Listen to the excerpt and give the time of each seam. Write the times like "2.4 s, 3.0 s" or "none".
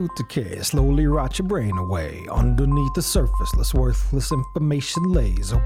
none